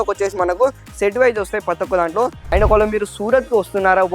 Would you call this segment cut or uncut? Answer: cut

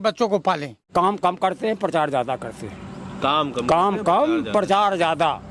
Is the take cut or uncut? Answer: cut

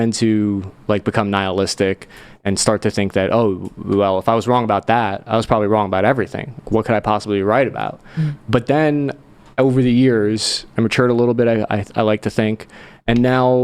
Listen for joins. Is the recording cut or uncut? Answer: uncut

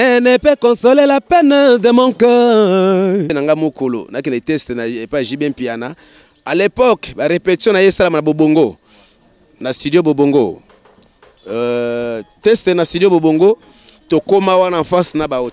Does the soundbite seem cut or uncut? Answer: cut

